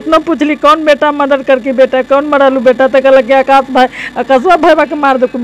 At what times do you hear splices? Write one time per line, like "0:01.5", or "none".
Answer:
none